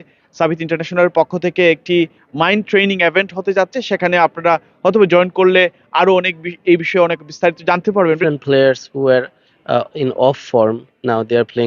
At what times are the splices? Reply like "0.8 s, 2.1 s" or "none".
8.1 s